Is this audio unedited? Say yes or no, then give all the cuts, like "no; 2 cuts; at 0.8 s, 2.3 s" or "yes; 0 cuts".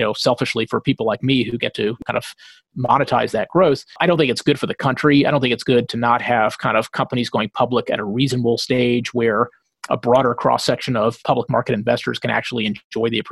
no; 3 cuts; at 2.0 s, 4.0 s, 11.2 s